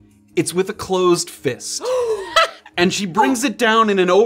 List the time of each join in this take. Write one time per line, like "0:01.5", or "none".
none